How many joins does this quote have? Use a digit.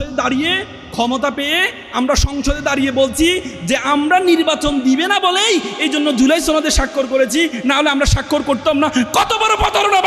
0